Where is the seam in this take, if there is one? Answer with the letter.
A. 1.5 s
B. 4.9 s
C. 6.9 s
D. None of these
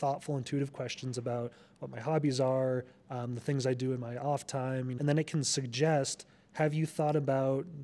B